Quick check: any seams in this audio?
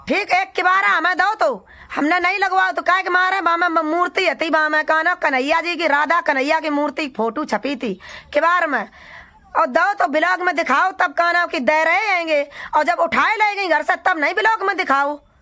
no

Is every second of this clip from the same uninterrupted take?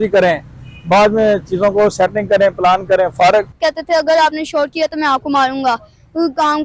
no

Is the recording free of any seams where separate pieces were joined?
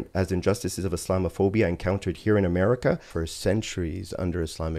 no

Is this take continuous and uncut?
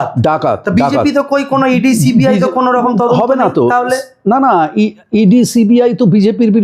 yes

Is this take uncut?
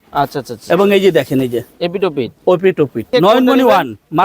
no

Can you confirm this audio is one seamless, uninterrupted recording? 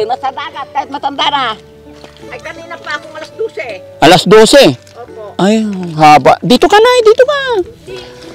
no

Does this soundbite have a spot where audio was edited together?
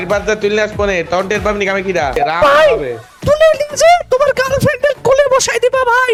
no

